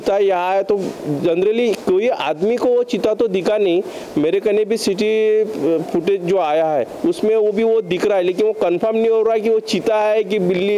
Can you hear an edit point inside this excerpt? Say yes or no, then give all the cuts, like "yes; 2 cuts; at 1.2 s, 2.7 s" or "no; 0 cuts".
no; 0 cuts